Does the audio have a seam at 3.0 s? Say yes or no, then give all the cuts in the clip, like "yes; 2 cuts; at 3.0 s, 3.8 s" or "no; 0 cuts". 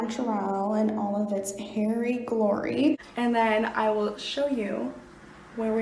yes; 1 cut; at 3.0 s